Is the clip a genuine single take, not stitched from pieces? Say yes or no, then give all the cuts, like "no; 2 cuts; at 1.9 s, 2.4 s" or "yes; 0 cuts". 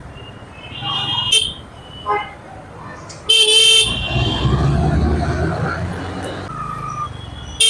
no; 1 cut; at 6.5 s